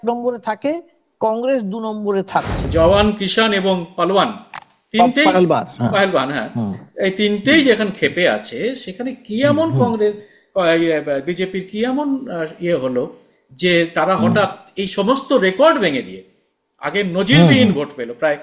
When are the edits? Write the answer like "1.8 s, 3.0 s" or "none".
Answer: 2.6 s